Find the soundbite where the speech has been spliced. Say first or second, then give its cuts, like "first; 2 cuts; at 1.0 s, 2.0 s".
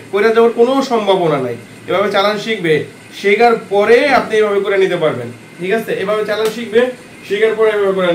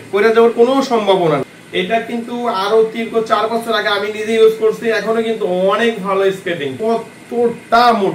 second; 2 cuts; at 1.6 s, 6.7 s